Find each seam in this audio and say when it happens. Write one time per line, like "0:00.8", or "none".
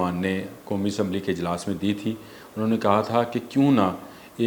none